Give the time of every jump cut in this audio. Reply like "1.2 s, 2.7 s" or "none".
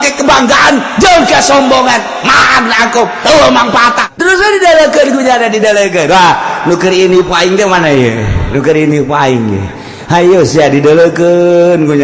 4.1 s